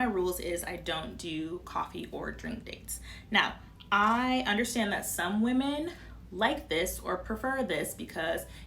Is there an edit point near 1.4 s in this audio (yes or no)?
yes